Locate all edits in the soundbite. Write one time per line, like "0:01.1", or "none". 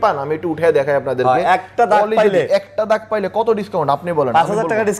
none